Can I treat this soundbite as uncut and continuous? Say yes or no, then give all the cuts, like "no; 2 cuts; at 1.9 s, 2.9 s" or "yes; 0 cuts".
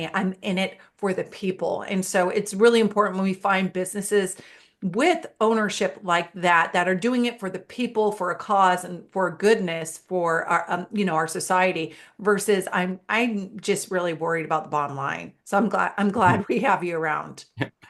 yes; 0 cuts